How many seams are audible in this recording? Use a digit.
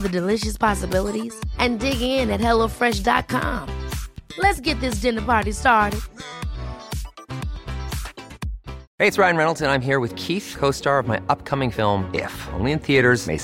1